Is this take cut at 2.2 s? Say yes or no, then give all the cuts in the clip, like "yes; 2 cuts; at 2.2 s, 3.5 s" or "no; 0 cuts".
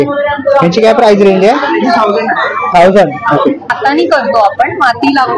no; 1 cut; at 3.7 s